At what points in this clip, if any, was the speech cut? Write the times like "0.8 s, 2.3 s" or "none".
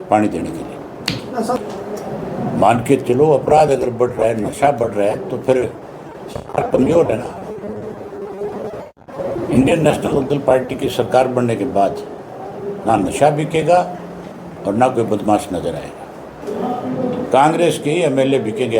1.6 s, 16.4 s